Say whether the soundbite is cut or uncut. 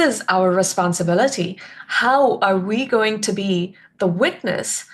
uncut